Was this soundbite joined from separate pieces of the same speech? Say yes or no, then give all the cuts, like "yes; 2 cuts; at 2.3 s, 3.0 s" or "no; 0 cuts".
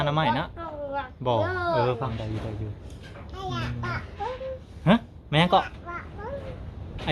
yes; 1 cut; at 2.1 s